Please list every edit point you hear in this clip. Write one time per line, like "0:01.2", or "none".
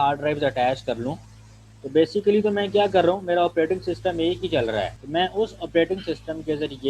0:05.0